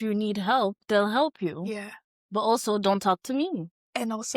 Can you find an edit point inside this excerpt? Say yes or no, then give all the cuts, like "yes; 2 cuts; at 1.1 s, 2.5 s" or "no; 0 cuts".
no; 0 cuts